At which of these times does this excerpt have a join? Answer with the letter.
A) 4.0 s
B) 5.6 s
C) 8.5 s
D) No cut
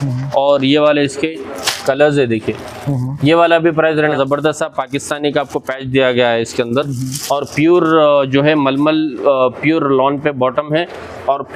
A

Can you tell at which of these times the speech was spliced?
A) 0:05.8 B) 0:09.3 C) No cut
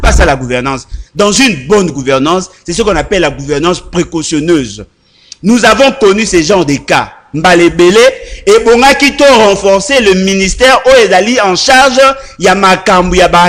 C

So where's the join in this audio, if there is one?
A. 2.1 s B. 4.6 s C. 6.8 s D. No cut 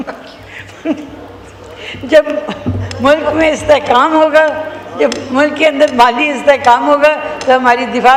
D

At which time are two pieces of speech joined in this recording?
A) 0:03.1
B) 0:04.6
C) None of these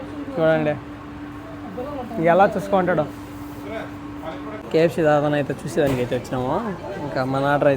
B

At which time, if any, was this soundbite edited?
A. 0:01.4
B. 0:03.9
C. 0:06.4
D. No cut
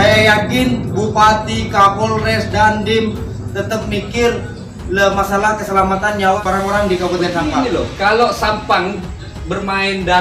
C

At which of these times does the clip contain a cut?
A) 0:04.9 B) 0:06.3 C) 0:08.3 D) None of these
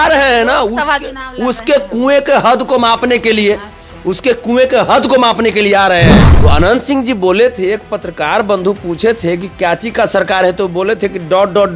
B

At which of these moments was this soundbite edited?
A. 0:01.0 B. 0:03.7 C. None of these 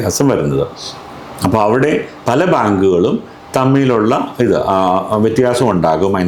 C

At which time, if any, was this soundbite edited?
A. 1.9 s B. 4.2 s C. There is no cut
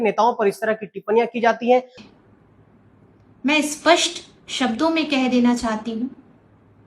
A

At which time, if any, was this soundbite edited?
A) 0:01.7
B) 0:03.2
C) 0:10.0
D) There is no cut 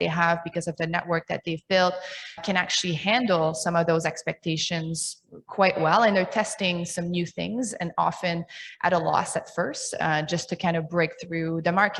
D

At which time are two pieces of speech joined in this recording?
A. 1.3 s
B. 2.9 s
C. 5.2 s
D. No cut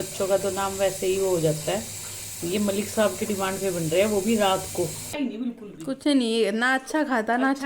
C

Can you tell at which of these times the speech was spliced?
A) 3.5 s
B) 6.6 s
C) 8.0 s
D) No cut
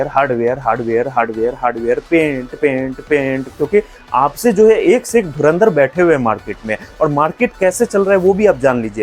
A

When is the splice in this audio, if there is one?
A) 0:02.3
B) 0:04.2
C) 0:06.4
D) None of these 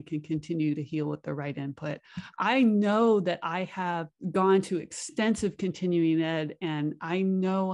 B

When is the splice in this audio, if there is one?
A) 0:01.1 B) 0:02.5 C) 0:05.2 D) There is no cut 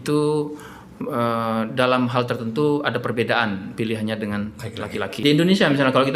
C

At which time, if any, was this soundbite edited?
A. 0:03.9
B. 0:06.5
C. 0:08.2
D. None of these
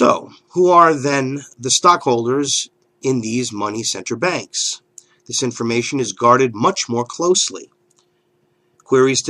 A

